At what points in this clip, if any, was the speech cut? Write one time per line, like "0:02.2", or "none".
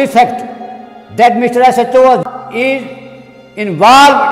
0:02.2